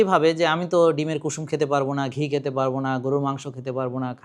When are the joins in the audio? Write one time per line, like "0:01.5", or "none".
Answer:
none

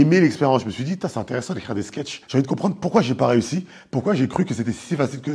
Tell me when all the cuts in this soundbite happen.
none

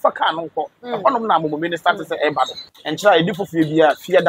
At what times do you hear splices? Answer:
0:02.7

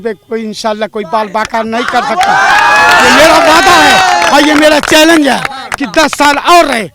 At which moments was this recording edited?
none

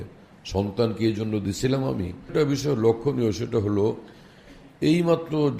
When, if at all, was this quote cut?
0:02.3

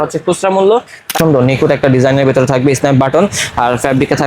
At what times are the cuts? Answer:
0:01.1

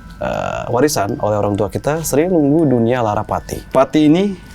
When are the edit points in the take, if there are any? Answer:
0:03.5

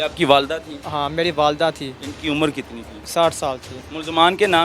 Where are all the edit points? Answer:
0:03.7

